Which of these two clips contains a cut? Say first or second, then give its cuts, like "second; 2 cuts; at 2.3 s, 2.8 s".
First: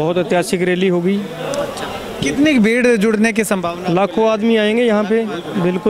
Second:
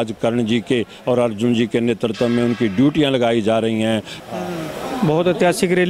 second; 1 cut; at 4.2 s